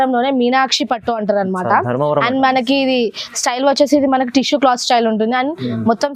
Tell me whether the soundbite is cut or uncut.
uncut